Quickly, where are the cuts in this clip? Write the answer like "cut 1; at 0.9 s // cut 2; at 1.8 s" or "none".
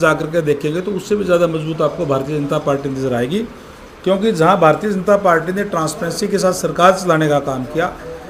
none